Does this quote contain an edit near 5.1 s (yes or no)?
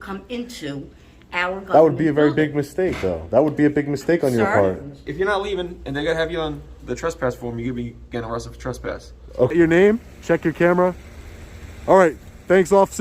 yes